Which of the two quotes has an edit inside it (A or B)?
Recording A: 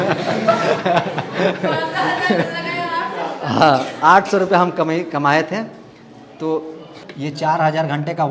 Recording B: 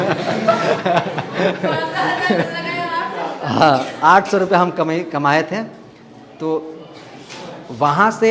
A